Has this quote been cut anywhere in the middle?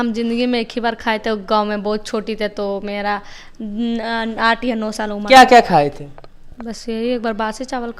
no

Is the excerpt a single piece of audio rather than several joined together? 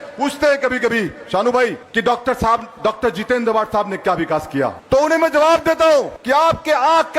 no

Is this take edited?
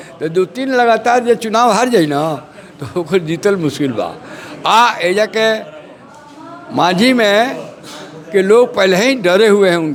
no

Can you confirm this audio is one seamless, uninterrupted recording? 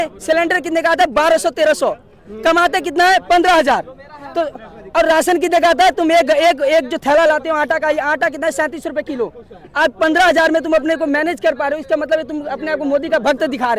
yes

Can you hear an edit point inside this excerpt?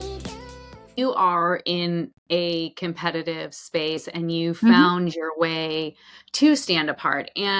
yes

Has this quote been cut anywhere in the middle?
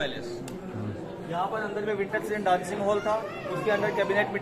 no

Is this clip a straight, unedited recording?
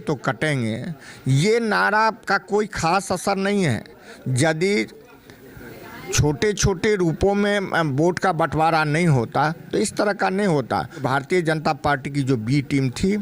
no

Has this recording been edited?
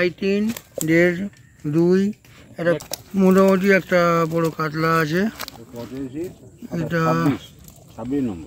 yes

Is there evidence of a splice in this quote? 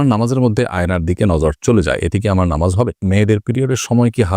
yes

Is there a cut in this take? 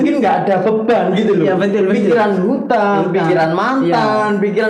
no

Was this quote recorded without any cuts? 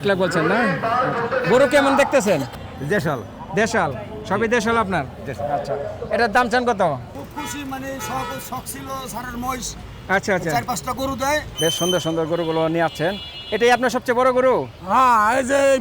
no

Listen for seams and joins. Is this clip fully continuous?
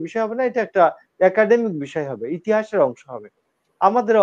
yes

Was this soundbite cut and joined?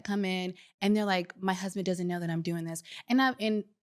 no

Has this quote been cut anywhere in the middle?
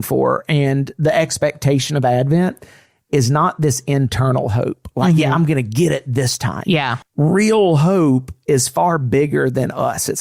yes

